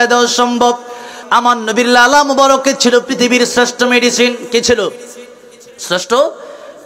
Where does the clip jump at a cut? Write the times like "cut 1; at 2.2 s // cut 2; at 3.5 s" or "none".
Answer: cut 1; at 1.2 s